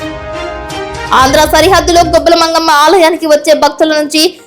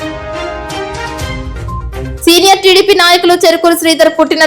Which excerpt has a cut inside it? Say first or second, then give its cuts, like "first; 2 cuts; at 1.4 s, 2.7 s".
first; 1 cut; at 1.1 s